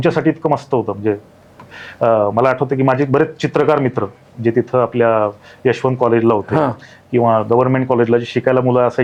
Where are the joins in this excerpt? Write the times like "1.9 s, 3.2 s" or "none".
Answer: none